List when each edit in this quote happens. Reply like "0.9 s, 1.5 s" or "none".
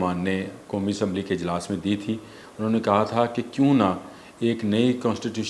none

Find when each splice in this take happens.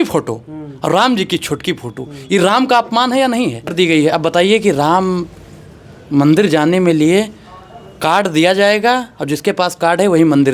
3.7 s

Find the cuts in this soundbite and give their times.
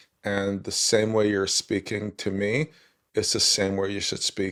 none

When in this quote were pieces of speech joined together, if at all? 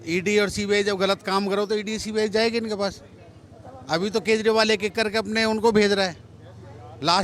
none

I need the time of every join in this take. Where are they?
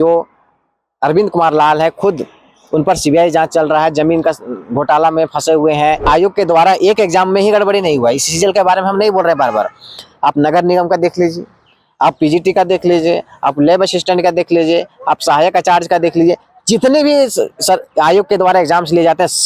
6.0 s

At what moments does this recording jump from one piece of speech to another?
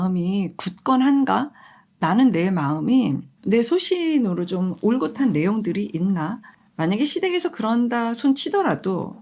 none

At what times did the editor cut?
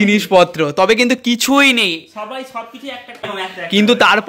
3.4 s

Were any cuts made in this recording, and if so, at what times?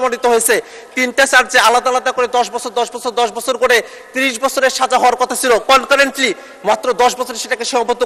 none

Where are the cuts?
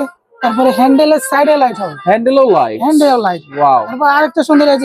none

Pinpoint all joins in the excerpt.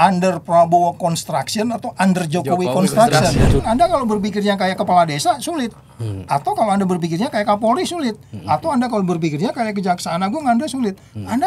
3.6 s

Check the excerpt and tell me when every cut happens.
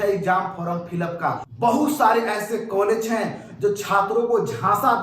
1.5 s

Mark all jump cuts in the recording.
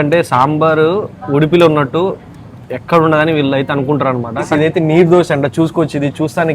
4.5 s

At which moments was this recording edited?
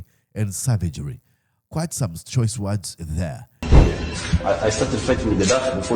3.7 s

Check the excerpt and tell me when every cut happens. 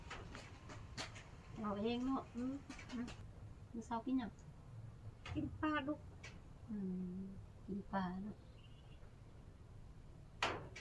3.2 s

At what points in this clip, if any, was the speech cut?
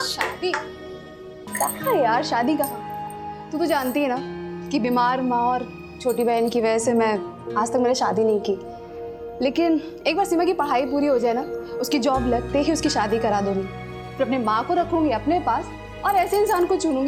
none

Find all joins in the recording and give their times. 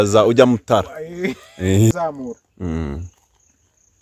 1.9 s

